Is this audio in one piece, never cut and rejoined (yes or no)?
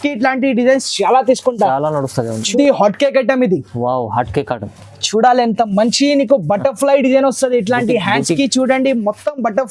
no